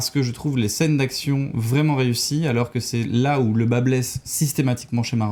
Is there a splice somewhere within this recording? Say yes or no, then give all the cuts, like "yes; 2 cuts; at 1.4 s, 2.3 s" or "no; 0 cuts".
no; 0 cuts